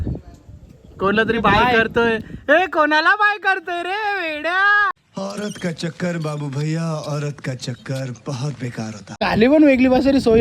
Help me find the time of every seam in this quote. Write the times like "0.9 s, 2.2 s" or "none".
9.0 s